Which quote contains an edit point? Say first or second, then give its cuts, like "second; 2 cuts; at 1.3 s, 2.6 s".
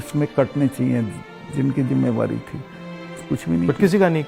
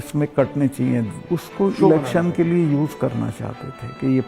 second; 1 cut; at 1.2 s